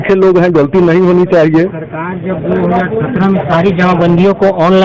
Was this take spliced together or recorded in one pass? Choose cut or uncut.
uncut